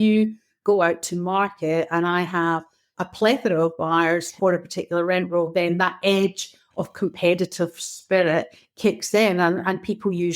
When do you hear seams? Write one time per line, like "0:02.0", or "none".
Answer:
0:02.9
0:04.3